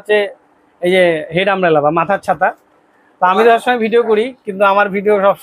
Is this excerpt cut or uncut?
uncut